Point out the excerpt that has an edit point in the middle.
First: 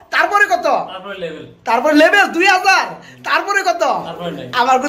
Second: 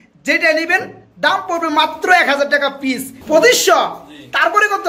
second; 1 cut; at 3.1 s

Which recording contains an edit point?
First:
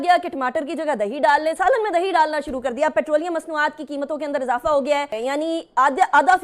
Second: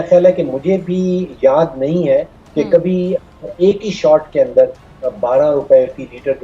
first; 1 cut; at 5.2 s

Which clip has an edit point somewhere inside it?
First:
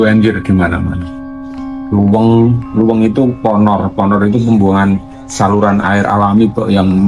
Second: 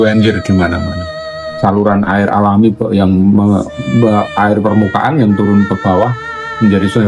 second; 1 cut; at 1.4 s

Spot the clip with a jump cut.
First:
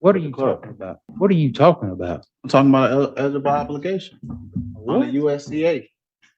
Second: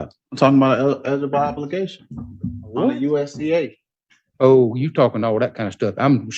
first; 1 cut; at 1.0 s

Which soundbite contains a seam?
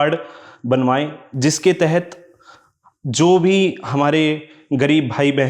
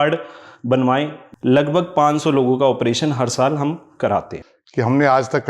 second; 2 cuts; at 1.2 s, 4.4 s

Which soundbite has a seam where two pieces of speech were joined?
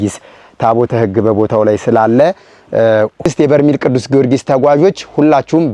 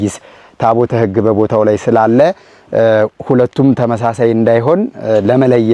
first; 1 cut; at 3.3 s

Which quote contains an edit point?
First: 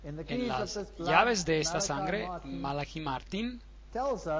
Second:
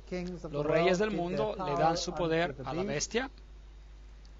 second; 1 cut; at 1.3 s

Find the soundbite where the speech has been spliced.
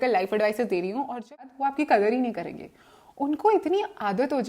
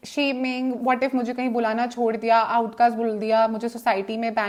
first; 1 cut; at 1.5 s

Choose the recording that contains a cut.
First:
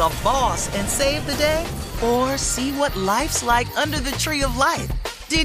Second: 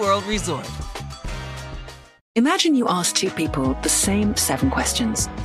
second; 1 cut; at 2.1 s

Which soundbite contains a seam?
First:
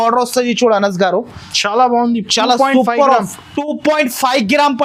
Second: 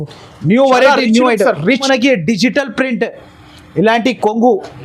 second; 1 cut; at 1.8 s

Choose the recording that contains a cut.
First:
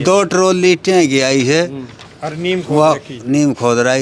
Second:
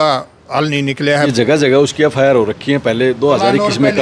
second; 1 cut; at 1.3 s

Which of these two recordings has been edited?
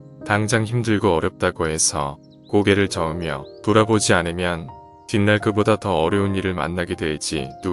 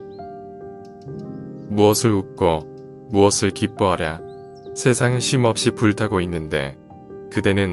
second; 1 cut; at 0.9 s

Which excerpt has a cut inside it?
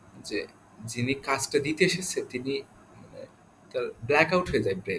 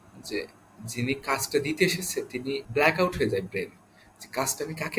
second; 1 cut; at 2.7 s

